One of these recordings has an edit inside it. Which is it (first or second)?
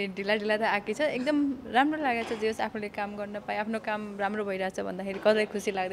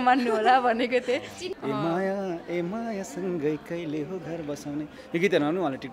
second